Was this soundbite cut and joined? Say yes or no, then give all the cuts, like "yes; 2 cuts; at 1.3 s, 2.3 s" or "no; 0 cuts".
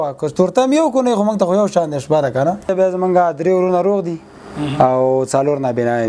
yes; 1 cut; at 2.7 s